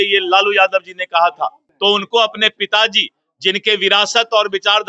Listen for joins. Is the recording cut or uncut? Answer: cut